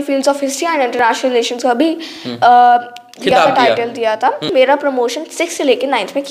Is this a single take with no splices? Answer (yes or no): no